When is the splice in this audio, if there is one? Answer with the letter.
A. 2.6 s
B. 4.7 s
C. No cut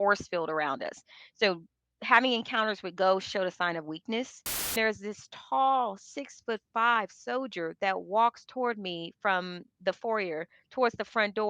B